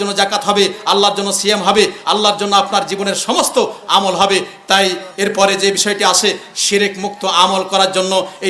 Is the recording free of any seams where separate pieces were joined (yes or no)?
yes